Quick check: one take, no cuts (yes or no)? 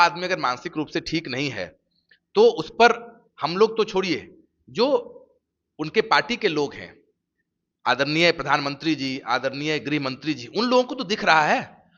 yes